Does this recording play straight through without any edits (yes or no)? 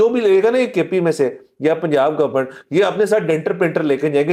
yes